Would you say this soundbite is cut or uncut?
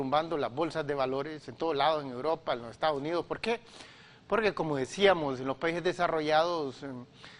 uncut